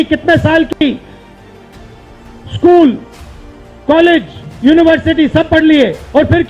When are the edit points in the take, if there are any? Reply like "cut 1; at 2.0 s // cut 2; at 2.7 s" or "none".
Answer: none